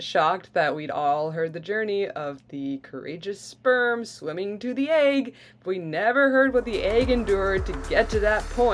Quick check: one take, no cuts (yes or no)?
yes